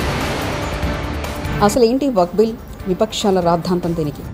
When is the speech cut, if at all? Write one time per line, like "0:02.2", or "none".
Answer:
0:01.5